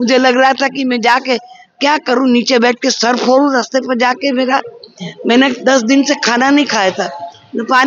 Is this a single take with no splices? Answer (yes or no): yes